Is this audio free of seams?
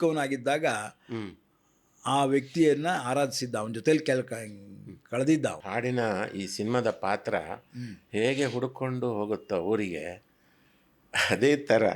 no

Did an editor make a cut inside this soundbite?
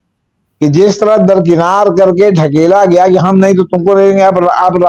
no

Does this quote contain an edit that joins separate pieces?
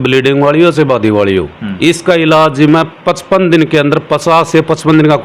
no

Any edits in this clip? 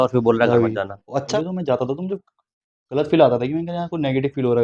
yes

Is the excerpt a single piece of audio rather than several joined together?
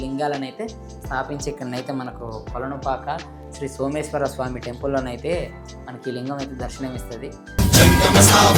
yes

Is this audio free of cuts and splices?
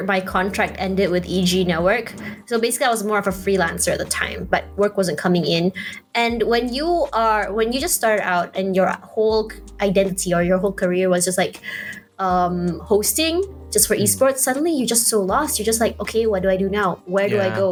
yes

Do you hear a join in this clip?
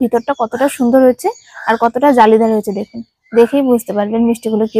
no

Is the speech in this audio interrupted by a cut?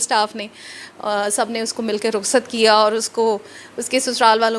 no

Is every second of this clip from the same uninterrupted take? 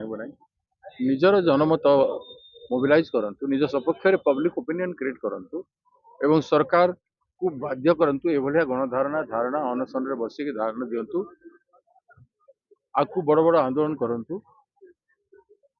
yes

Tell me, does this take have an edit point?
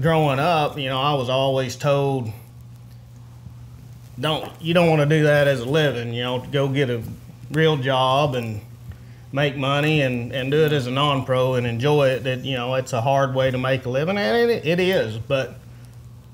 no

